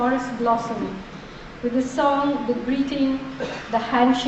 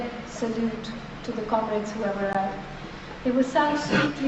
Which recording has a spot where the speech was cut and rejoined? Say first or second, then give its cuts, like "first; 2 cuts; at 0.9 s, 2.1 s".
first; 1 cut; at 3.2 s